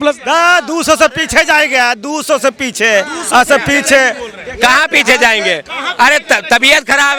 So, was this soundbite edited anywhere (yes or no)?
no